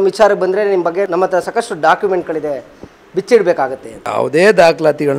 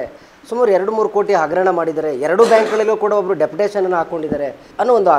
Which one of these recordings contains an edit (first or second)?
first